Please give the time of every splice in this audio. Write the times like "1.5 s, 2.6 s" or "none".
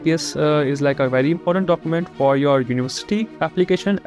none